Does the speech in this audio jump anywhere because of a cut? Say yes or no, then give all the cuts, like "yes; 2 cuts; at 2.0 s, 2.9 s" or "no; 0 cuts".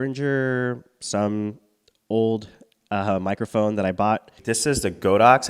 yes; 1 cut; at 4.3 s